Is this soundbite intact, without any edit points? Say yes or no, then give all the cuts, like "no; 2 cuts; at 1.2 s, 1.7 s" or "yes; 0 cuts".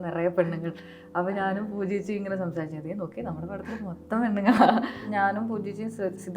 no; 1 cut; at 5.0 s